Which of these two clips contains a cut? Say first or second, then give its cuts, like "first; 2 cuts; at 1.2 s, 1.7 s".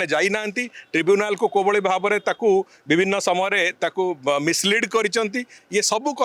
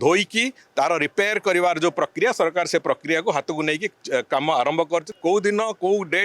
second; 1 cut; at 5.1 s